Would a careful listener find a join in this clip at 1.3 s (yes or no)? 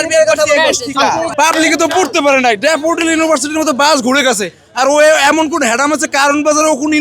yes